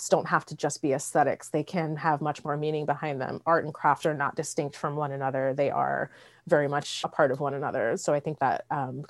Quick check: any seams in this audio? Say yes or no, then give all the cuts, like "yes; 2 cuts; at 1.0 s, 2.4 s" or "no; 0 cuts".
yes; 1 cut; at 7.0 s